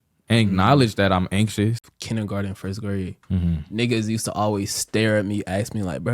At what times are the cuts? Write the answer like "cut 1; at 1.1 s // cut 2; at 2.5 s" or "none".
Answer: cut 1; at 1.8 s